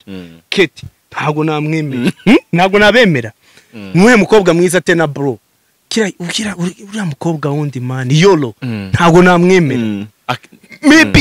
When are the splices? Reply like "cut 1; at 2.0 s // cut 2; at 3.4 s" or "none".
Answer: cut 1; at 10.1 s